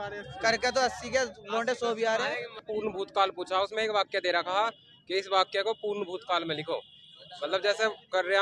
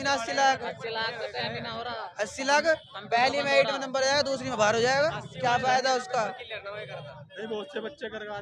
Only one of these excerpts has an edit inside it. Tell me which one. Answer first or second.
first